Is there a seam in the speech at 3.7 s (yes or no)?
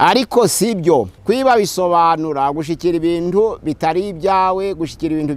no